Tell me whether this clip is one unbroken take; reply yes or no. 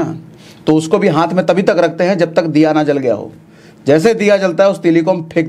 yes